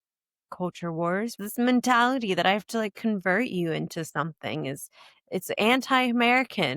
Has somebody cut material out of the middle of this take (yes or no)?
yes